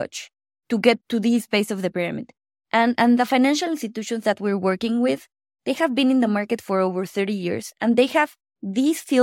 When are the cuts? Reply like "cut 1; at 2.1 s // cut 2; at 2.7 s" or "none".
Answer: cut 1; at 1.0 s